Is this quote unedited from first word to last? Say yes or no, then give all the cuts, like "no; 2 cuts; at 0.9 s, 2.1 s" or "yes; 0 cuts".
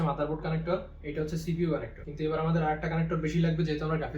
no; 2 cuts; at 1.0 s, 2.0 s